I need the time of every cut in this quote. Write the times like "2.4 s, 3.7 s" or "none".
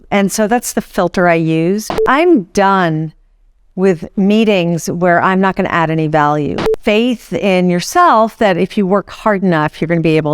2.0 s, 6.5 s

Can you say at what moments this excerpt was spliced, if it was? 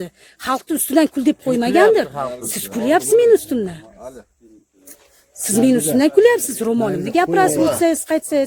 none

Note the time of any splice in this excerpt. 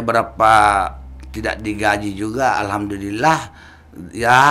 none

